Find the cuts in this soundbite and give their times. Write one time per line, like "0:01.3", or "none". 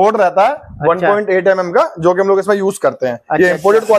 none